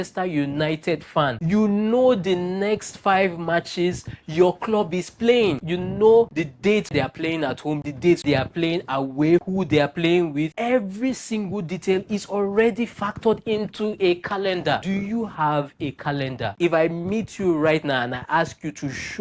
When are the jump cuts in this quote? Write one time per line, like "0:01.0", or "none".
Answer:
0:14.8